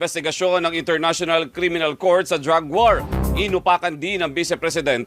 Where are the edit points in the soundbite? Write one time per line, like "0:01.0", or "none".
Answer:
0:02.9